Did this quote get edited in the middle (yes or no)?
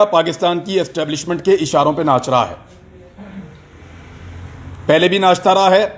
no